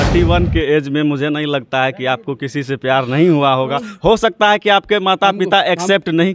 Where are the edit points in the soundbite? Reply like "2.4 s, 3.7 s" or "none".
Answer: none